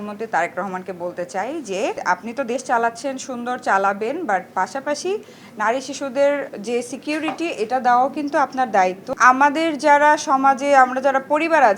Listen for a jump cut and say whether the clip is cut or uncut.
uncut